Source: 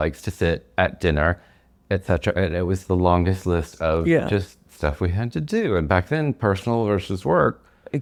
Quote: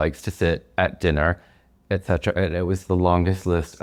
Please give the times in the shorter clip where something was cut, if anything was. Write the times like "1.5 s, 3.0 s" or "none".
none